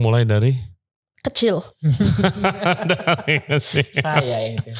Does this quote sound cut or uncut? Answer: uncut